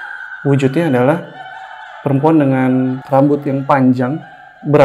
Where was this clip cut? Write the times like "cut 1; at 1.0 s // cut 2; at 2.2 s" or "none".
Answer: cut 1; at 3.0 s